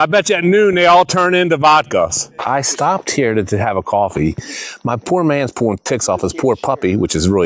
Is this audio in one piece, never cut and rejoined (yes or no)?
no